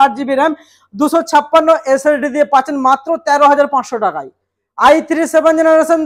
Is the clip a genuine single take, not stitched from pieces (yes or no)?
yes